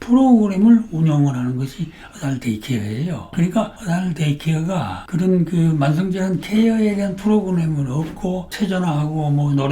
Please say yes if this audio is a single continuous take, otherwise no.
no